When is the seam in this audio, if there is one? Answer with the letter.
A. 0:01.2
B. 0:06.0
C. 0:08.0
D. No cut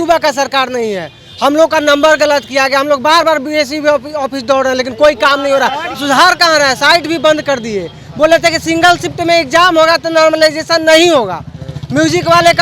B